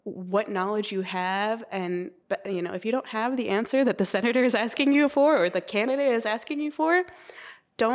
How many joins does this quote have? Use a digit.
0